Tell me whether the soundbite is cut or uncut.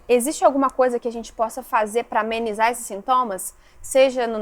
uncut